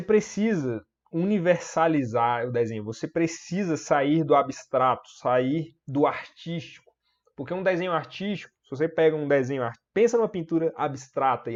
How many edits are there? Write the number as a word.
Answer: zero